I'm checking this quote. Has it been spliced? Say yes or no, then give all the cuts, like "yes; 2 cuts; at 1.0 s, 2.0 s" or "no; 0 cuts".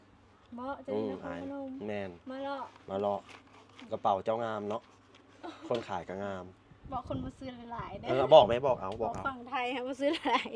no; 0 cuts